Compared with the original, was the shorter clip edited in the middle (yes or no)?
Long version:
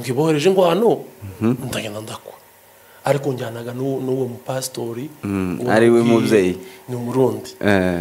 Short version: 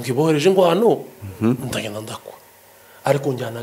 no